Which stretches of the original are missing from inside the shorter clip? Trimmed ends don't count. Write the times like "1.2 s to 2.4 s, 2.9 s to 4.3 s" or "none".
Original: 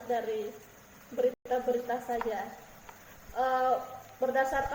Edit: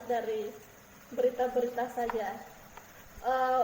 1.3 s to 1.5 s